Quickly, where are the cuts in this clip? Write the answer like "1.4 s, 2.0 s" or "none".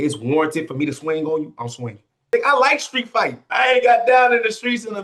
2.3 s, 3.4 s